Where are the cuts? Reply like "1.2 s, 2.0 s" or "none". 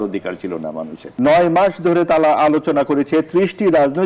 1.0 s